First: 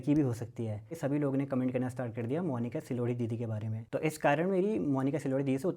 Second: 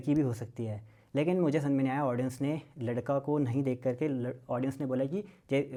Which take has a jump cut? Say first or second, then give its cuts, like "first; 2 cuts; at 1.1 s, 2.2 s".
first; 2 cuts; at 0.9 s, 3.7 s